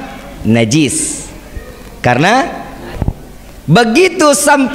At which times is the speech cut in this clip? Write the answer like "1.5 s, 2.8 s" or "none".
2.9 s

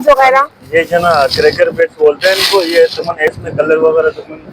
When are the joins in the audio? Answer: 3.3 s

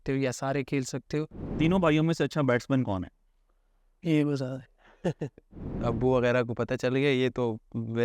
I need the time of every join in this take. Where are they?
1.5 s, 5.7 s

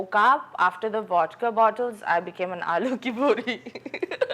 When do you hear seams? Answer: none

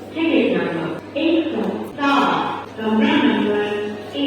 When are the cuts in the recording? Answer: 1.0 s, 1.9 s, 2.6 s

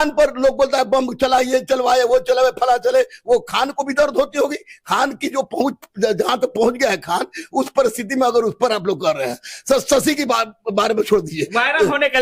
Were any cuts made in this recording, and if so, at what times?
none

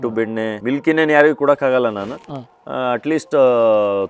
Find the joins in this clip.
none

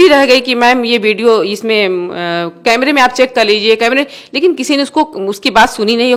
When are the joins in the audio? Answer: none

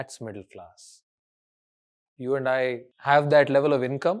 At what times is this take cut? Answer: 2.9 s

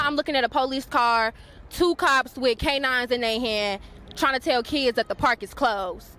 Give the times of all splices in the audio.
none

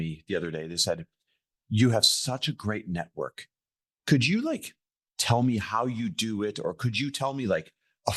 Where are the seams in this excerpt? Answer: none

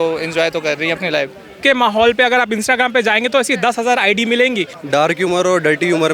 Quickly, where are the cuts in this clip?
1.6 s, 4.7 s

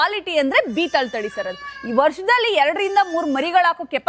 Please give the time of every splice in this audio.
none

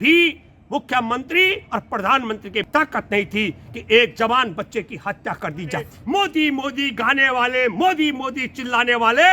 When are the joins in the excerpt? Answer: 2.7 s, 6.0 s

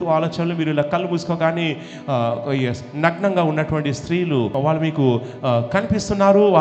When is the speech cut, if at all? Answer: 4.5 s

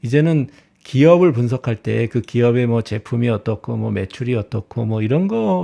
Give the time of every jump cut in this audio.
none

